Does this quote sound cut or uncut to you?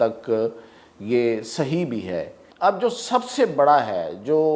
cut